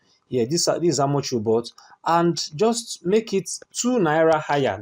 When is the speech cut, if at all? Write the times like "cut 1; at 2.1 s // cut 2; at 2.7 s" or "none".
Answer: none